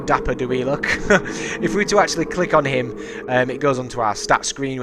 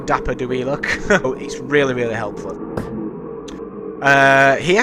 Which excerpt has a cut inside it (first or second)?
first